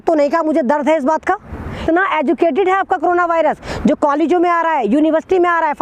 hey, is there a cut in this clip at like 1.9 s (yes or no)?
yes